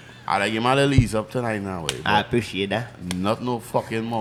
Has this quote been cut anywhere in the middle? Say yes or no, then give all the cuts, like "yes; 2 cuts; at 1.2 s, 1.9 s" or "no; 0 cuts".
no; 0 cuts